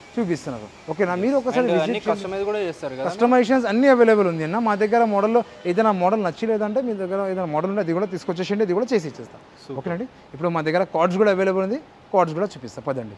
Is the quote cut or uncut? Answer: uncut